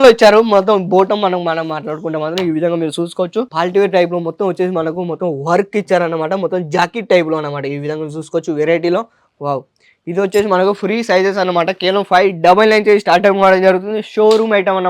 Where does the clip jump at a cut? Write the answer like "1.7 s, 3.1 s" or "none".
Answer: none